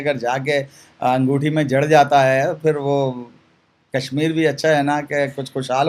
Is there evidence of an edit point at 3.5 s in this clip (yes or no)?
no